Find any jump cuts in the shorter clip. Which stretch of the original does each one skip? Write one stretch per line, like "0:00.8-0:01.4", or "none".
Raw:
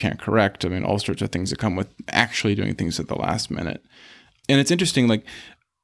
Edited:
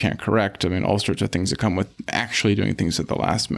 none